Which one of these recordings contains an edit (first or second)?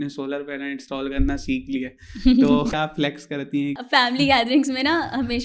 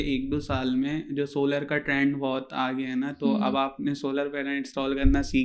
first